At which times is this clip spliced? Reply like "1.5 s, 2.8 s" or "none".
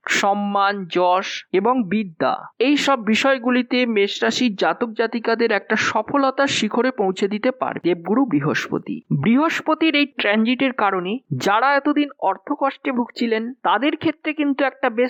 none